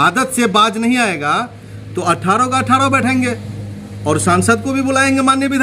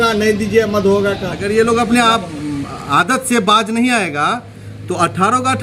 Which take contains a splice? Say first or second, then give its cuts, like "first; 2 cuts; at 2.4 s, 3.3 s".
second; 1 cut; at 1.4 s